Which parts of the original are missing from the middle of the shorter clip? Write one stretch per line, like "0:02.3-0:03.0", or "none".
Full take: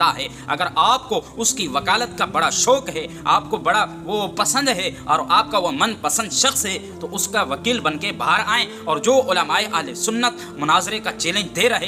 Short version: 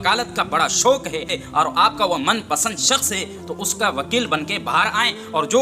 0:03.1-0:04.9